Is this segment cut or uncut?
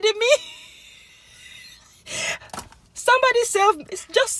cut